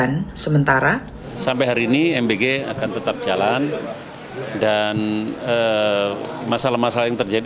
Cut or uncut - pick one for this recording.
cut